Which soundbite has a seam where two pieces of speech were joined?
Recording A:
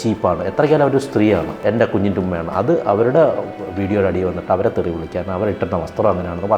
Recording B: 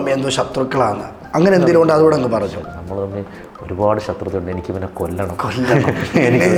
A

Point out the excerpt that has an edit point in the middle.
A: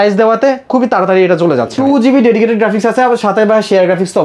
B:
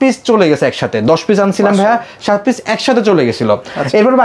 A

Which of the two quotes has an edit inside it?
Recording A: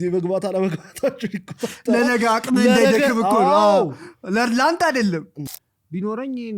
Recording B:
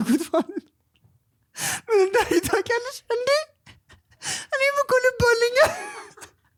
A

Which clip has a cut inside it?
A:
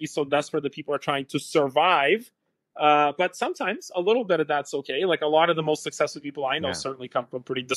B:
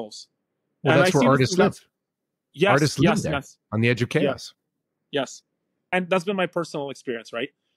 B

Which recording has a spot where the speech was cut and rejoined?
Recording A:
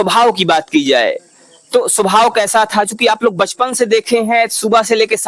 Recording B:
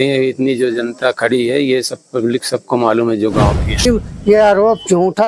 B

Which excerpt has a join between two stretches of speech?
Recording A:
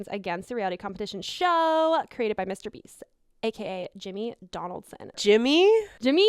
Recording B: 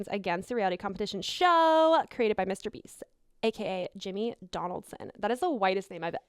A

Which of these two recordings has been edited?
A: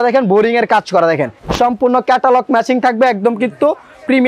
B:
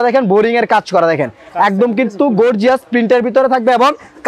A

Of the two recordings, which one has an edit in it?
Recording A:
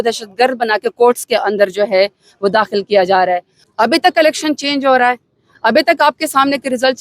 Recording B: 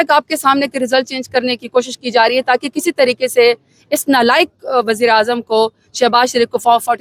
A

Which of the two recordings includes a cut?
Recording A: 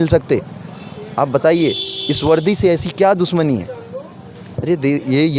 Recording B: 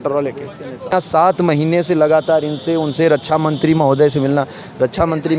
B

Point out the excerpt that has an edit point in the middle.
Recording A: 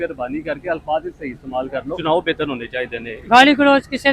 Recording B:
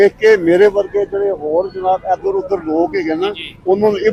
A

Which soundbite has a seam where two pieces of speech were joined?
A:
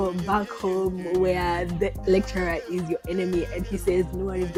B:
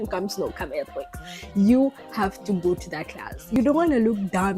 B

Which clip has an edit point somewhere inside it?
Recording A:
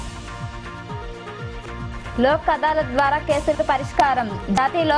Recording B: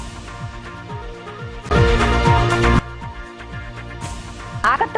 B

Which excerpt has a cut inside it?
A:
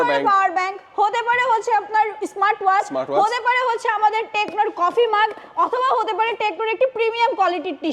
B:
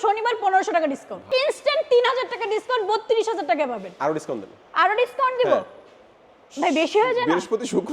B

